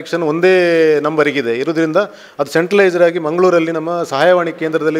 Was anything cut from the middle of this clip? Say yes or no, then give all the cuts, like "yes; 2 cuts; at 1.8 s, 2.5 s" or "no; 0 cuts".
no; 0 cuts